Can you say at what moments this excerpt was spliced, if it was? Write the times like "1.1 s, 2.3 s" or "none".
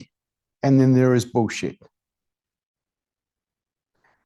none

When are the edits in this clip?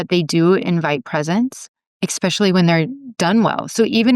3.0 s

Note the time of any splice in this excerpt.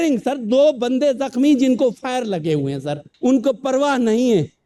3.1 s

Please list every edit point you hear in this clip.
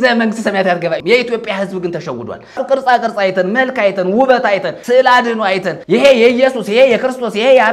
1.0 s, 2.6 s, 4.7 s, 5.7 s

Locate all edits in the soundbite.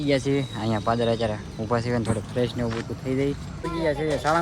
3.5 s

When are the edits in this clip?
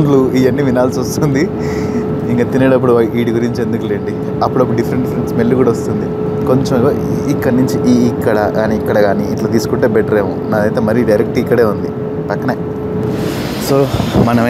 none

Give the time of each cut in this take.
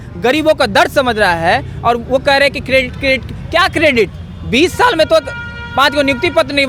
none

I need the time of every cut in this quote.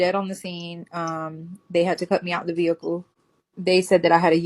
3.2 s

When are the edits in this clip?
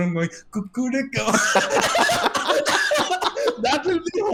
none

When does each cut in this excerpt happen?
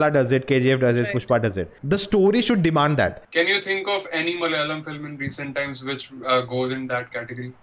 1.7 s, 3.2 s

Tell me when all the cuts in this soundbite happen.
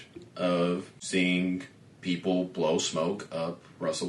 0.9 s

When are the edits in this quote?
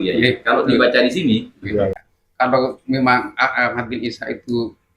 2.1 s

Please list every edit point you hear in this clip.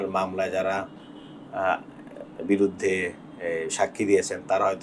none

